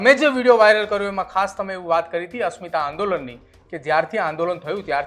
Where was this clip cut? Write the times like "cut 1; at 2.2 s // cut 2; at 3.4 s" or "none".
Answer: none